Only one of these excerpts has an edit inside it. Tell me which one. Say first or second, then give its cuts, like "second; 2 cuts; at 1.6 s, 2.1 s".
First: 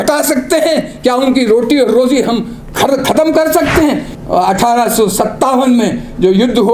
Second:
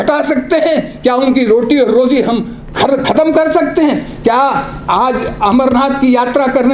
first; 1 cut; at 4.1 s